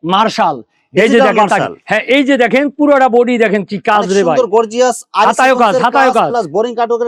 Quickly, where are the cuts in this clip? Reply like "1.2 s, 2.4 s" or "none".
none